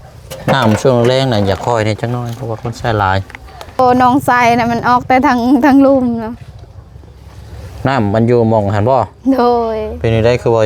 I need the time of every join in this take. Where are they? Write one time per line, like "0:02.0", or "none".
0:03.8